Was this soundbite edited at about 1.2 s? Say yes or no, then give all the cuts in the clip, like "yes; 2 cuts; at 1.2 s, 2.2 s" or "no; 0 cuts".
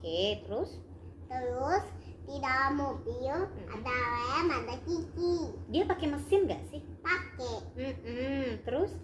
no; 0 cuts